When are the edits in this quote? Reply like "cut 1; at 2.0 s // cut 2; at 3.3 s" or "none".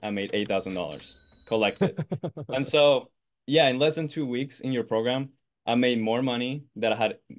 none